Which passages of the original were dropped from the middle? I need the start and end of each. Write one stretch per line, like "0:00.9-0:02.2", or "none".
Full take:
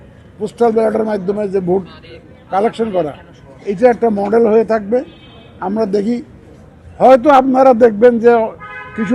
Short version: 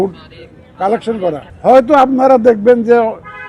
0:03.2-0:06.8

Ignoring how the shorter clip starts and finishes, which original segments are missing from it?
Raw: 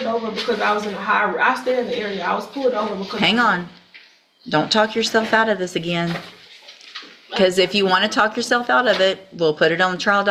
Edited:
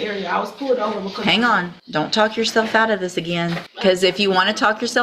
0:03.7-0:04.3
0:06.2-0:07.2

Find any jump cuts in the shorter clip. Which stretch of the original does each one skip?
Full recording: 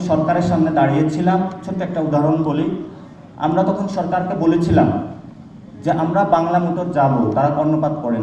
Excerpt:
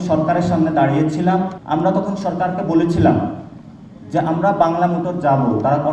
0:01.6-0:03.3

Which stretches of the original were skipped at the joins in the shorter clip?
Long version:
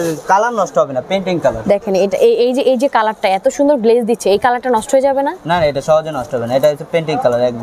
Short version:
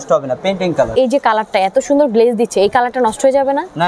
0:01.6-0:02.6

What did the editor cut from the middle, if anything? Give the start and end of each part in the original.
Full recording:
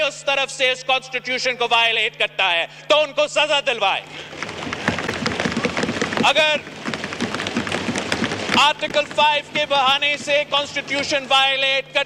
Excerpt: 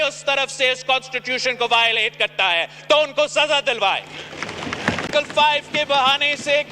0:05.1-0:08.9

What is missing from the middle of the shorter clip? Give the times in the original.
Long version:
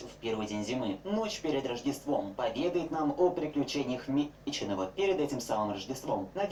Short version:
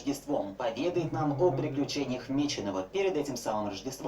0:04.3-0:04.6

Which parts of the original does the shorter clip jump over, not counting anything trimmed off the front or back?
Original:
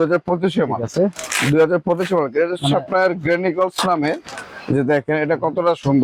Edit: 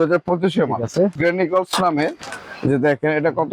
0:01.2-0:03.2

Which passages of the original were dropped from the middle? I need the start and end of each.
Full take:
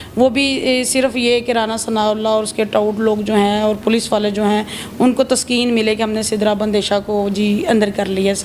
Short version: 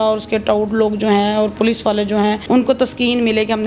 0:04.7-0:04.9

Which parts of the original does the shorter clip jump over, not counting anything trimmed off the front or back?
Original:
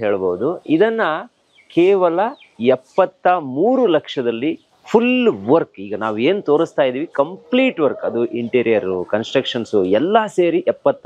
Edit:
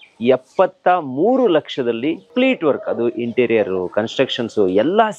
0:04.6-0:07.4

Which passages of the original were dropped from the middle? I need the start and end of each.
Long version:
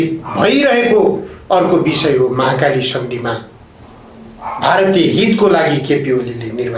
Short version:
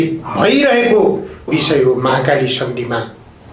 0:01.5-0:01.8

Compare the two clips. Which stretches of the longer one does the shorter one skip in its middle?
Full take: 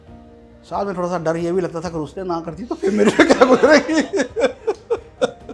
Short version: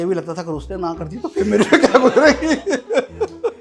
none

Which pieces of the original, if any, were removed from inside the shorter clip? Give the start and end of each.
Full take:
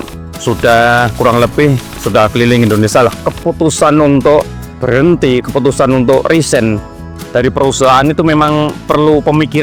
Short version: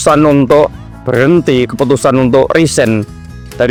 none

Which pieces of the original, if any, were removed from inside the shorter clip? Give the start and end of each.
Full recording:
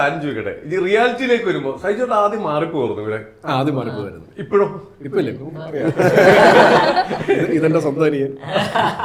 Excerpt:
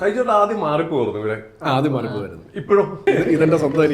0:04.8-0:07.2

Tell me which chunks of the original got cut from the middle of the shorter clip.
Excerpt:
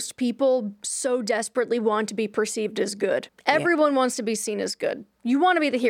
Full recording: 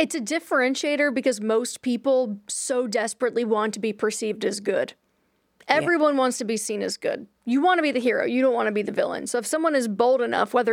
0:05.0-0:05.5

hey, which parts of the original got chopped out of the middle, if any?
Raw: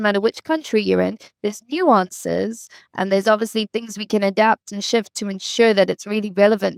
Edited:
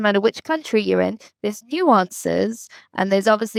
none

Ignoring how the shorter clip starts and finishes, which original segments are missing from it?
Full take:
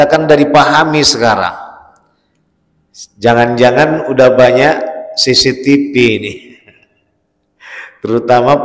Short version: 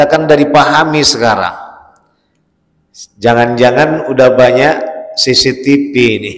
none

